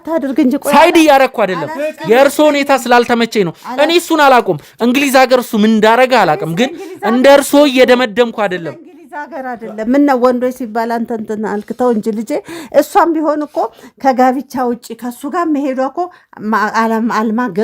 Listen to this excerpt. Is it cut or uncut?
uncut